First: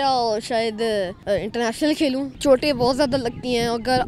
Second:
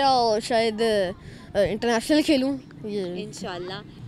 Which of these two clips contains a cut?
first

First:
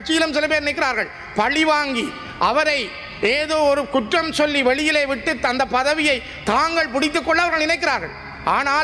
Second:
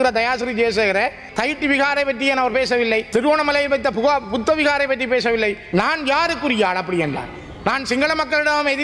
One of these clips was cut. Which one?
second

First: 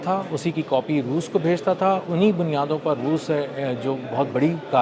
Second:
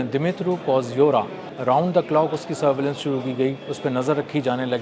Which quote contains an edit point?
second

